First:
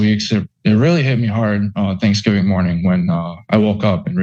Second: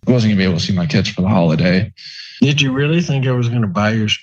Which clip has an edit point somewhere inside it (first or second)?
second